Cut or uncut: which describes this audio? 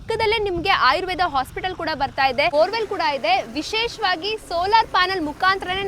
cut